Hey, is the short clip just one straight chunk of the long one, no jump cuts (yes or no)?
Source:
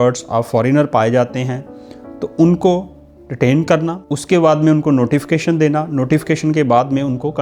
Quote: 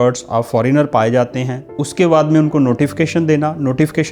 no